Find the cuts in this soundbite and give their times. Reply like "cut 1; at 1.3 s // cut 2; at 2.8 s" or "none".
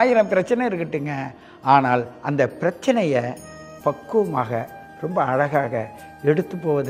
none